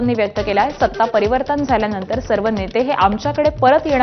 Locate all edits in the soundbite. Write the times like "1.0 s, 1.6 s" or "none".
none

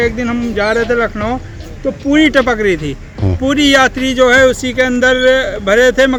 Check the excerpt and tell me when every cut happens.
none

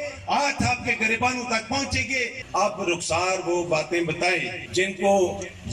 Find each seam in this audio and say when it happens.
2.4 s, 4.6 s

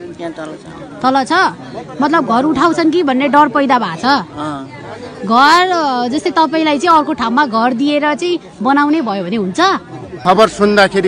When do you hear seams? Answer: 10.2 s

